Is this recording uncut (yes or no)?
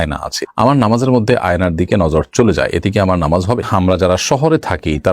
no